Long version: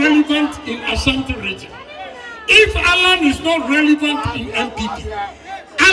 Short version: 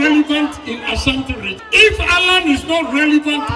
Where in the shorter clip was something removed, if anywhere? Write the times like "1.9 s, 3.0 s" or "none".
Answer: 1.6 s